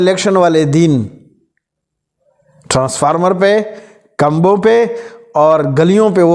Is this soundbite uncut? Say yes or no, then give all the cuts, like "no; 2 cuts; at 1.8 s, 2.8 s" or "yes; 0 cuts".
yes; 0 cuts